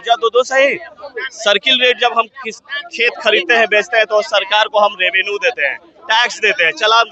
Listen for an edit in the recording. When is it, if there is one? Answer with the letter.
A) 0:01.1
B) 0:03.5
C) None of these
C